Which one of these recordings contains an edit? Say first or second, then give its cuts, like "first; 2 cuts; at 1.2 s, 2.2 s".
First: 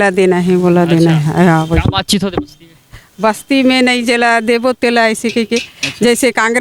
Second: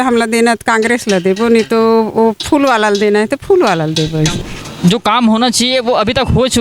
second; 1 cut; at 4.4 s